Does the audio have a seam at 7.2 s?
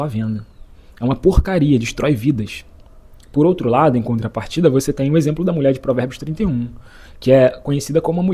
no; 0 cuts

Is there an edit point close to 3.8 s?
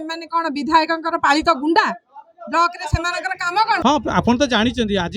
yes; 1 cut; at 3.8 s

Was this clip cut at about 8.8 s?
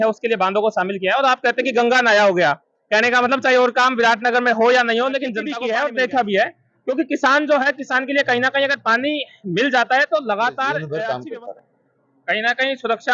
no; 2 cuts; at 5.5 s, 10.8 s

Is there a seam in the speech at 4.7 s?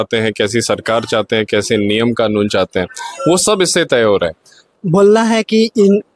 yes; 1 cut; at 4.7 s

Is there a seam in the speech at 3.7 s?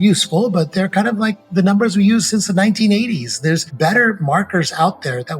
yes; 1 cut; at 3.7 s

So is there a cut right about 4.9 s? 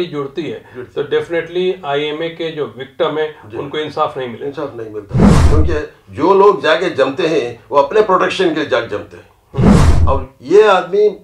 no; 1 cut; at 9.8 s

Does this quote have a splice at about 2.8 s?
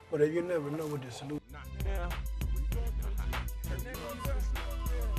no; 1 cut; at 1.4 s

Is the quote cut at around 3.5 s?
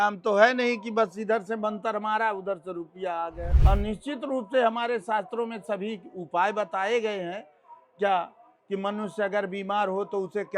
yes; 1 cut; at 3.5 s

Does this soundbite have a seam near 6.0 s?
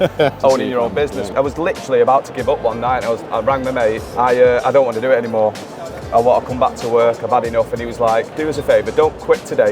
no; 3 cuts; at 1.3 s, 4.1 s, 8.3 s

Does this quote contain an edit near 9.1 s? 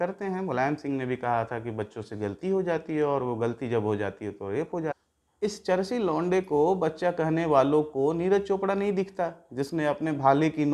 no; 1 cut; at 5.0 s

